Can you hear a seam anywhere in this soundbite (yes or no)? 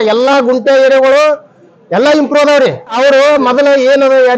no